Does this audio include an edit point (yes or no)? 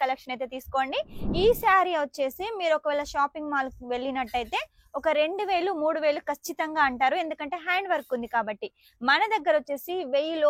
yes